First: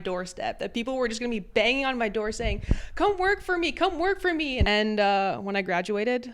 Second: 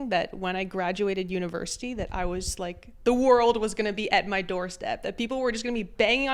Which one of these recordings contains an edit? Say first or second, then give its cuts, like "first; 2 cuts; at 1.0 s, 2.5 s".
first; 1 cut; at 4.6 s